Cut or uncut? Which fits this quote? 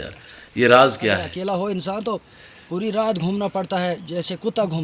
cut